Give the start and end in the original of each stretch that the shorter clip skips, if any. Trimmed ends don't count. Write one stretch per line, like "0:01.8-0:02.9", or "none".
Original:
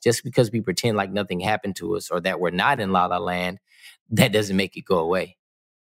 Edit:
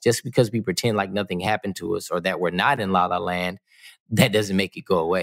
none

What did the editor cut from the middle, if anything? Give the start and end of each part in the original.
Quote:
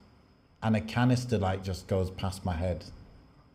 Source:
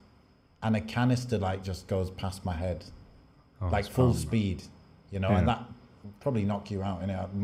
none

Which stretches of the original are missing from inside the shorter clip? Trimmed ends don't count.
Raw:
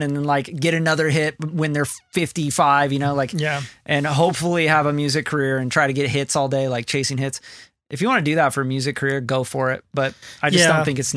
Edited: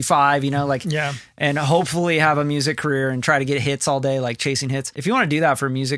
0:07.4-0:07.9

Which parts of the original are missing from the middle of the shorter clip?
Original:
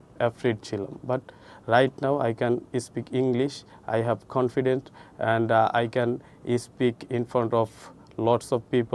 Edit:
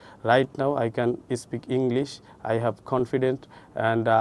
none

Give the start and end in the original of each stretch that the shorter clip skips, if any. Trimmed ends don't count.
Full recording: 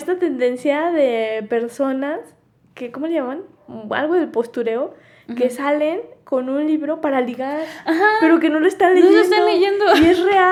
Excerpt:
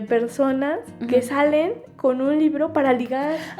0:02.3-0:05.2

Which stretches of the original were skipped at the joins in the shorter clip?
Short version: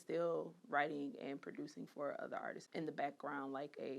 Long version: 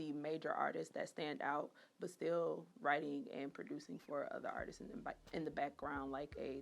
0:04.8-0:05.2

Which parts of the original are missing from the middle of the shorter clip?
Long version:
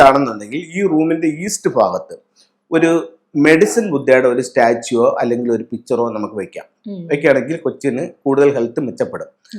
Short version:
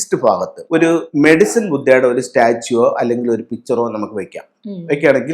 0:02.5-0:03.2

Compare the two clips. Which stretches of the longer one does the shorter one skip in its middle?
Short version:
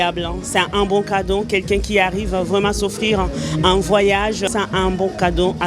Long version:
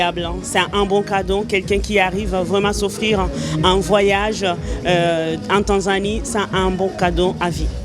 0:04.5-0:06.3

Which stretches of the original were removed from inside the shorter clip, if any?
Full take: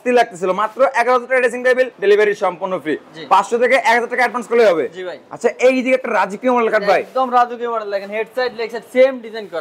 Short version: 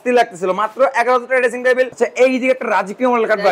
0:01.9-0:05.4

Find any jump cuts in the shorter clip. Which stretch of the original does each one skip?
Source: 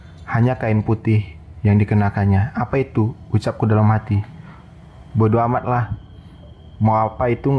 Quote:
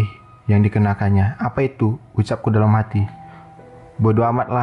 none

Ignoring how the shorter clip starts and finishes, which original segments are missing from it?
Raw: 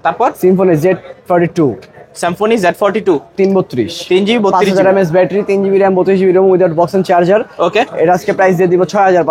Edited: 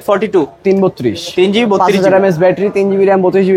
none

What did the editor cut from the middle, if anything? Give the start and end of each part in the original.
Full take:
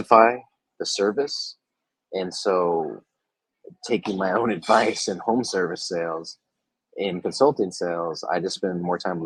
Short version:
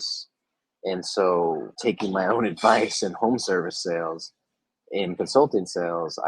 0:03.0-0:03.8

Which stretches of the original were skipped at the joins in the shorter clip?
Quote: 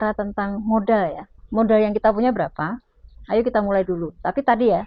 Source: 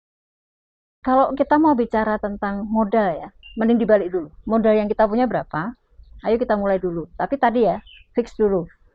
0:03.4-0:04.3

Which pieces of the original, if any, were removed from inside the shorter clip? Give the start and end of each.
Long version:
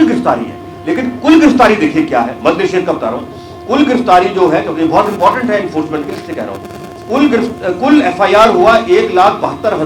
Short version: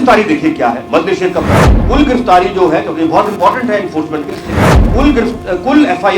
0:03.3-0:03.5
0:06.6-0:07.0

